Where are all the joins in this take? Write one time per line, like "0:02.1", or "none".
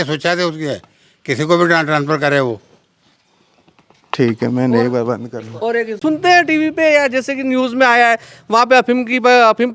0:06.0